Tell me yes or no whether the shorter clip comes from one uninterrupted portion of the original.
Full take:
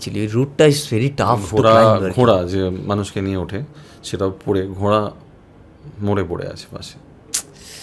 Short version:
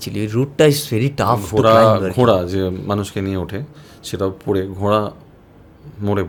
yes